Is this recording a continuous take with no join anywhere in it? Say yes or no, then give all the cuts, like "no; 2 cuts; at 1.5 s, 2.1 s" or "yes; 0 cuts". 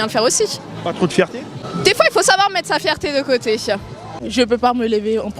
no; 2 cuts; at 1.6 s, 4.3 s